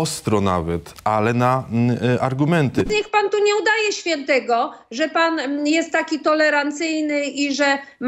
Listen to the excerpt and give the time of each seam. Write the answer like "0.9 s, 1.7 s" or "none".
2.9 s

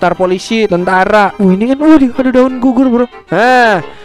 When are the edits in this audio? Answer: 1.3 s

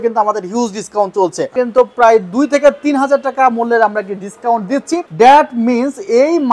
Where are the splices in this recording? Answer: 1.5 s, 5.1 s

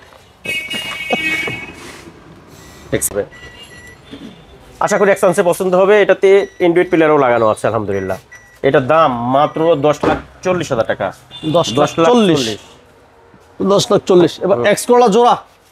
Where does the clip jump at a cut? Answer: 3.1 s

